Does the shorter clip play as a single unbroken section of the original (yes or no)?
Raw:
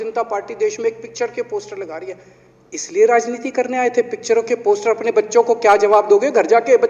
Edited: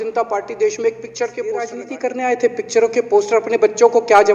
no